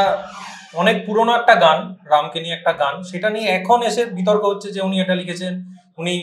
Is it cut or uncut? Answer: uncut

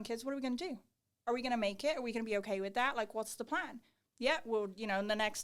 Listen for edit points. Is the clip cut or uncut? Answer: uncut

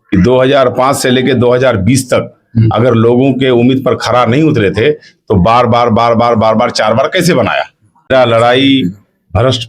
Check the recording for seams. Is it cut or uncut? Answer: cut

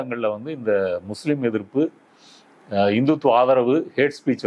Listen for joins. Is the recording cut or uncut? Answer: uncut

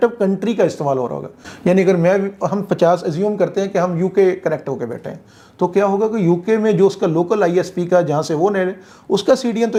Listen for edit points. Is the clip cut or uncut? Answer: uncut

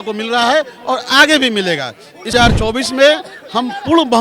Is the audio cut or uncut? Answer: cut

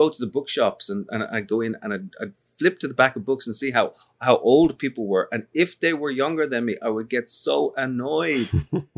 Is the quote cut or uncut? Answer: uncut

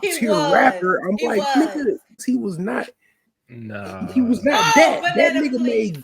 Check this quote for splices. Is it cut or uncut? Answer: cut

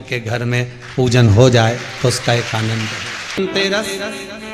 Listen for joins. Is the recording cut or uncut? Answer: cut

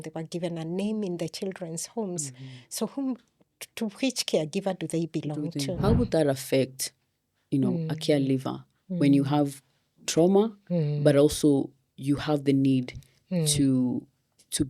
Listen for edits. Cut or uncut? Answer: cut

